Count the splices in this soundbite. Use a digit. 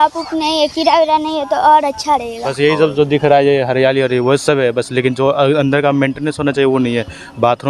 1